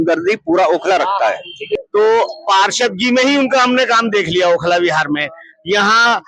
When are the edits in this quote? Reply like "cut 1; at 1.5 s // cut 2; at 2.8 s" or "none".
cut 1; at 1.7 s